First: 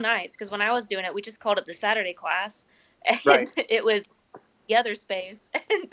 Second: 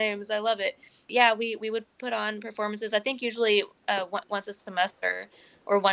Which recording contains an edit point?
second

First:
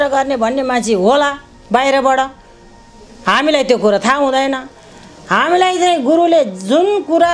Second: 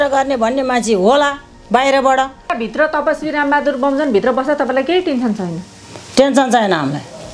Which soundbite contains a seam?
second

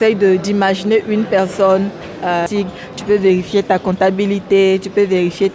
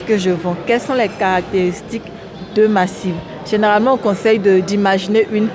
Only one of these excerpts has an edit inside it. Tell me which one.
first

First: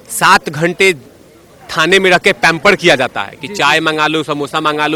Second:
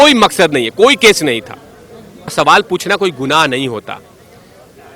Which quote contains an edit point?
second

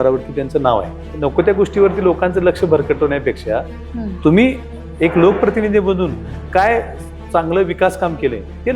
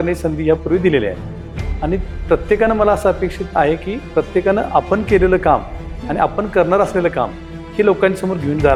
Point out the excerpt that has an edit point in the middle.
first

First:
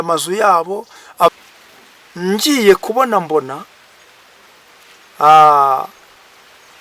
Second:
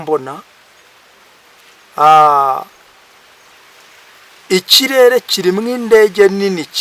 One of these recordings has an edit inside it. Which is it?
first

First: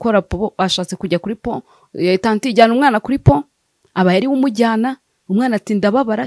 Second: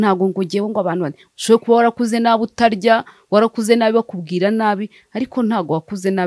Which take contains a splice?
second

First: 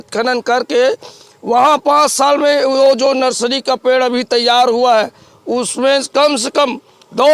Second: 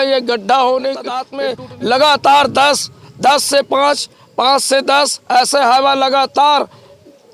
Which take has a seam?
second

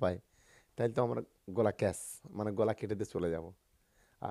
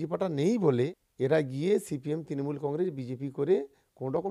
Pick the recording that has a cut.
second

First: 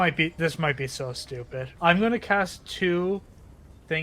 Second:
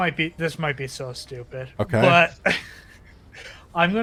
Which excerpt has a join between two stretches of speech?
first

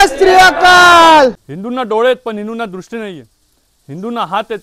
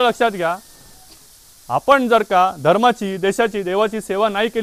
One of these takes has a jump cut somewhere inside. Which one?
first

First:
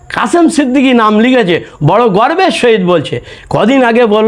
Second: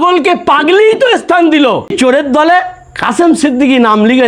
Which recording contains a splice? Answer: second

